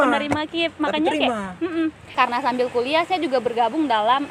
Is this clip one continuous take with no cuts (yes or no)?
no